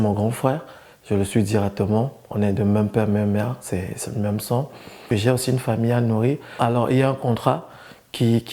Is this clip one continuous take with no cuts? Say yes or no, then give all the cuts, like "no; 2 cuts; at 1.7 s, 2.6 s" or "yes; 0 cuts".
no; 2 cuts; at 5.0 s, 6.5 s